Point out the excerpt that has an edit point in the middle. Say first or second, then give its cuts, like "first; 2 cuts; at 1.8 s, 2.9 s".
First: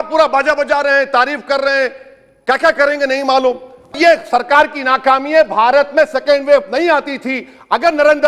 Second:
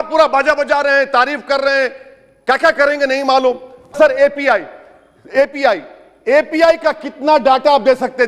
first; 1 cut; at 3.9 s